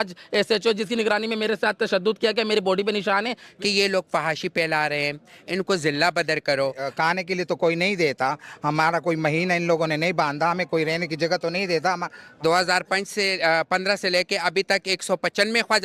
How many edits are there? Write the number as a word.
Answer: three